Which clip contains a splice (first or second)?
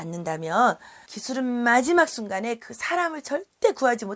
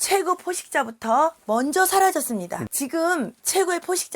second